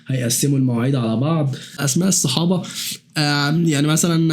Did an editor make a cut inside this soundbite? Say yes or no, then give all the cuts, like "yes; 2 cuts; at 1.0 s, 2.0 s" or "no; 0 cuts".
yes; 1 cut; at 1.8 s